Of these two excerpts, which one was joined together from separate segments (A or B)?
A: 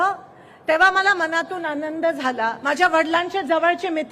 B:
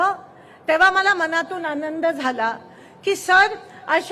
A